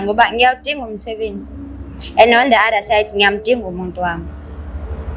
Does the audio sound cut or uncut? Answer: uncut